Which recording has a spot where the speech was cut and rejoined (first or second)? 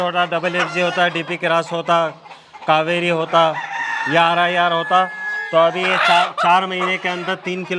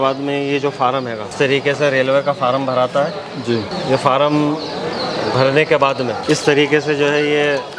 second